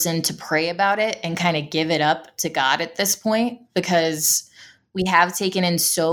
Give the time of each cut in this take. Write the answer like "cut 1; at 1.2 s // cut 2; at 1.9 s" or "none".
none